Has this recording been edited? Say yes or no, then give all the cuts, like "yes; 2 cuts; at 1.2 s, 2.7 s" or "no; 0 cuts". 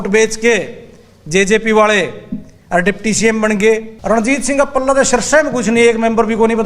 yes; 1 cut; at 3.9 s